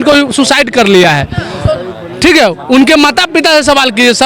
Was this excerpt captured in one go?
yes; 0 cuts

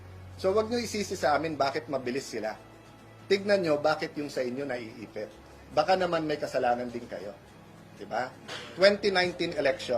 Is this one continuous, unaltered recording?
no; 1 cut; at 8.5 s

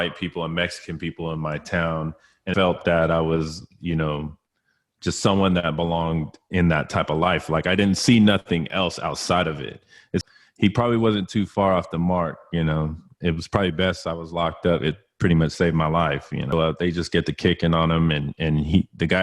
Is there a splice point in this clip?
yes; 3 cuts; at 2.5 s, 10.3 s, 16.5 s

